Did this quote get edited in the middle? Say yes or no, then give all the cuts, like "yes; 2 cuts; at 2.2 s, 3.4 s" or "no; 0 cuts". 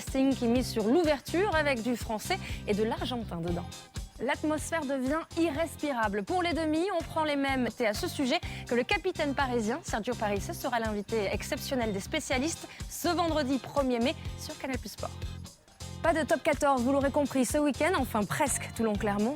no; 0 cuts